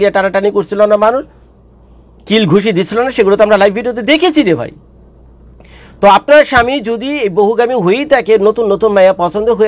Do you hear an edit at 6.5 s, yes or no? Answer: no